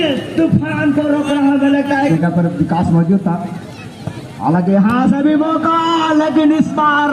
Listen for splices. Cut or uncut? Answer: cut